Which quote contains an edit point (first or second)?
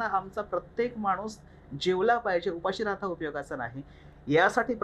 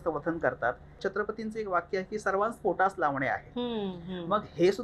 second